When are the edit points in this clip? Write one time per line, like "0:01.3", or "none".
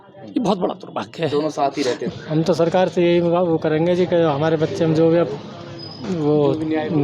0:02.1